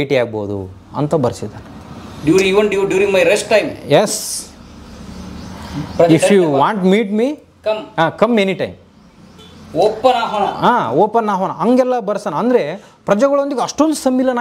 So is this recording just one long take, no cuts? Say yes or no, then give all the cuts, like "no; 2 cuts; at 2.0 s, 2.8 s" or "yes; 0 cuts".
yes; 0 cuts